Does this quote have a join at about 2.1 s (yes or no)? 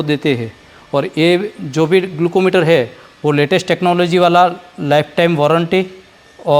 no